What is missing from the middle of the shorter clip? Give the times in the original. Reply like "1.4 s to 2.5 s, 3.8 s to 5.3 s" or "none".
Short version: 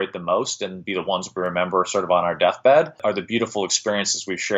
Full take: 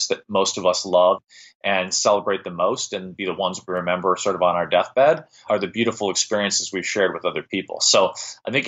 5.3 s to 5.4 s